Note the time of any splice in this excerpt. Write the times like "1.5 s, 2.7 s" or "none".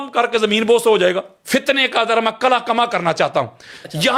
1.3 s